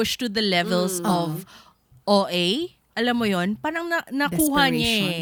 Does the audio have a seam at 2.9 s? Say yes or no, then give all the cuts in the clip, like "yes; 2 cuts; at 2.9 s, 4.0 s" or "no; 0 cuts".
no; 0 cuts